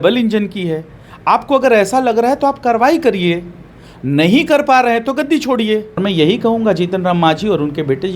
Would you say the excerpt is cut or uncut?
cut